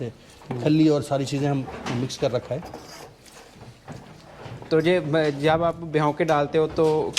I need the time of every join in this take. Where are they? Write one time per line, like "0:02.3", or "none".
none

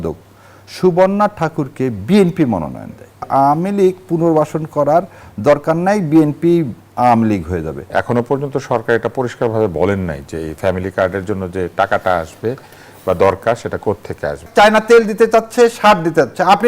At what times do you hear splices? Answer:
0:03.2
0:07.8
0:14.5

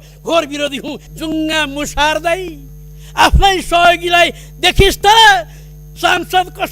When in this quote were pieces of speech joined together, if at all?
0:01.0

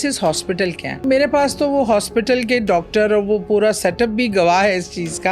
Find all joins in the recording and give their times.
0:01.0

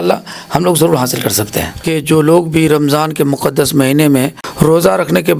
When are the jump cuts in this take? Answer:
0:01.9
0:04.4

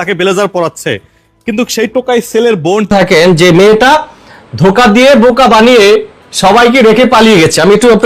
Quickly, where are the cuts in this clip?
0:02.9

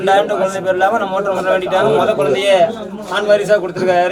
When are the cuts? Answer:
none

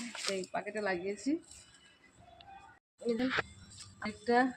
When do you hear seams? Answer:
0:02.8

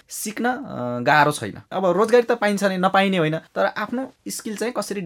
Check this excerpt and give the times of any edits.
0:01.7

